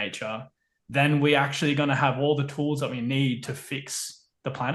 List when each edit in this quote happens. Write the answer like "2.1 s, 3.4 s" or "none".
none